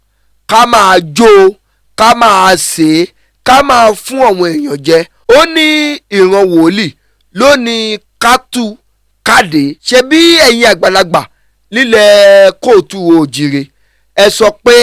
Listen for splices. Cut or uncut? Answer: cut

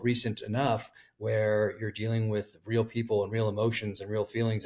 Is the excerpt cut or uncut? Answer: uncut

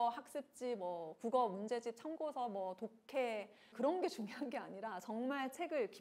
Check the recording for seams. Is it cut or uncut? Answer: cut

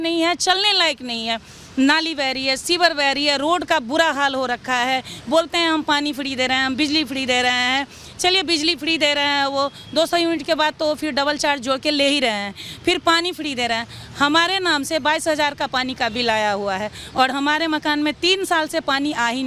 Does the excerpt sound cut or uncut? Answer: uncut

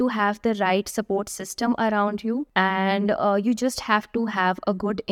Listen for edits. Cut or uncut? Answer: cut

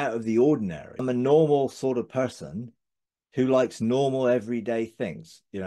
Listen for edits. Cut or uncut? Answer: cut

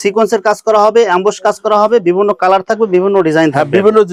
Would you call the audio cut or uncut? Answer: uncut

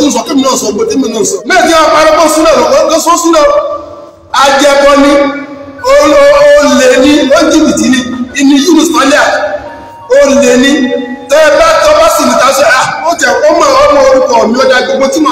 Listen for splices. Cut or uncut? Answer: cut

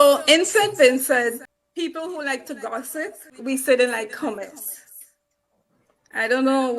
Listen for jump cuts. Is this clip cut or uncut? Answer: cut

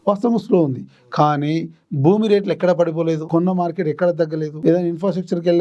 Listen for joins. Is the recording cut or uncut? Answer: cut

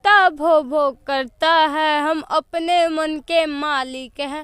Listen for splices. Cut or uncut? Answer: uncut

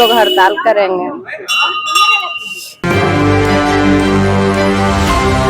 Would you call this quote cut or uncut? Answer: cut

